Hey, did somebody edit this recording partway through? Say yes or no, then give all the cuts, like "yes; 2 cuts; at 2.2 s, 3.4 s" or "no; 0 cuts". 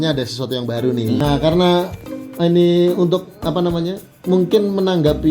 yes; 1 cut; at 1.2 s